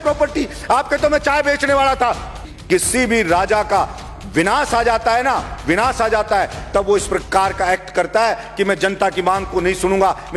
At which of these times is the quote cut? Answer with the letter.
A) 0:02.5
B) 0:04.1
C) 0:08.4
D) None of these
A